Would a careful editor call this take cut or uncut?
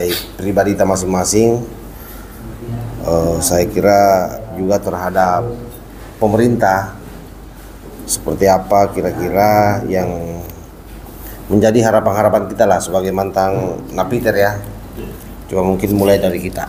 uncut